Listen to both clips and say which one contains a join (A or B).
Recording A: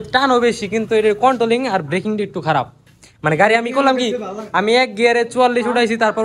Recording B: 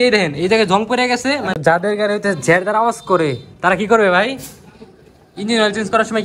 B